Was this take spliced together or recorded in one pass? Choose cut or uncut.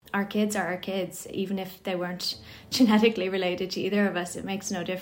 uncut